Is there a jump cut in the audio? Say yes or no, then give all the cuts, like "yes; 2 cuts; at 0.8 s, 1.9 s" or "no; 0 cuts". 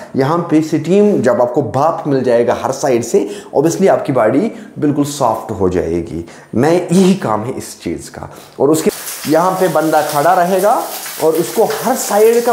yes; 1 cut; at 8.9 s